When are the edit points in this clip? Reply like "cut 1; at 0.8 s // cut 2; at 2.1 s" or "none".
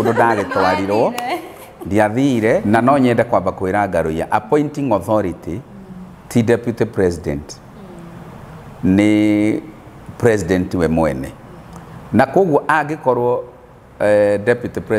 cut 1; at 2.6 s